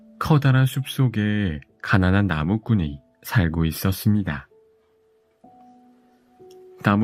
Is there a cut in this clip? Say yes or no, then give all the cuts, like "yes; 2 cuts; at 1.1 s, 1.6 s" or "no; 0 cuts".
no; 0 cuts